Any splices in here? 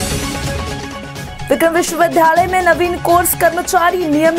yes; 1 cut; at 1.2 s

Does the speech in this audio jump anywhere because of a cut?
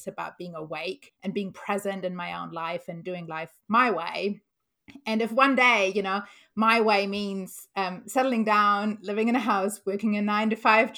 yes; 1 cut; at 1.1 s

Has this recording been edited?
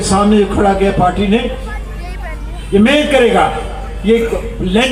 no; 0 cuts

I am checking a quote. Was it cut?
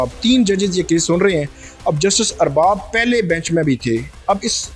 no; 0 cuts

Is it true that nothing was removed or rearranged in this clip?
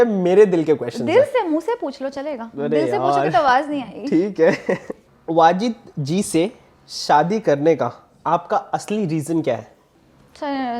yes; 0 cuts

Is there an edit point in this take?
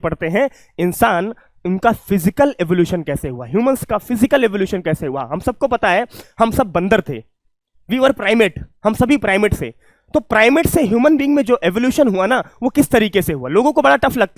no; 0 cuts

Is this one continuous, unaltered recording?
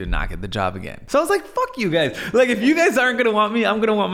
no; 1 cut; at 0.9 s

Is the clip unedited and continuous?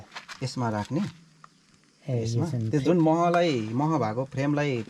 yes; 0 cuts

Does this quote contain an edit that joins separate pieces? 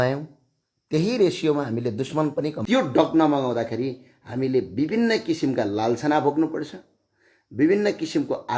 yes; 1 cut; at 2.6 s

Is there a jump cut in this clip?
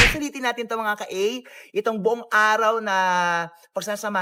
no; 0 cuts

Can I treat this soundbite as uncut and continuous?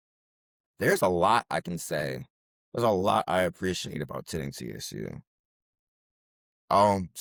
yes; 0 cuts

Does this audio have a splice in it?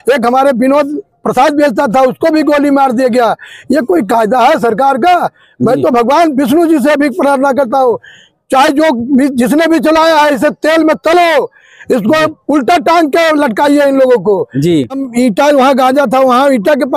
yes; 1 cut; at 15.0 s

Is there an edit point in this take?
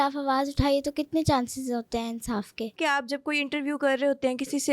yes; 1 cut; at 2.8 s

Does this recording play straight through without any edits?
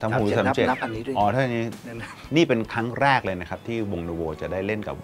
no; 1 cut; at 2.2 s

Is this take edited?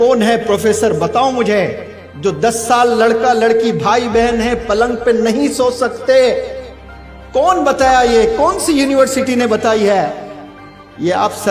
no; 0 cuts

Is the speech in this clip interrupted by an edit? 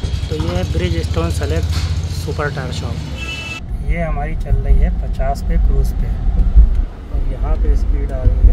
yes; 1 cut; at 3.7 s

